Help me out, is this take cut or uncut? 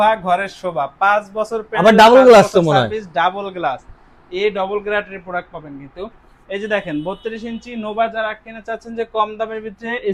uncut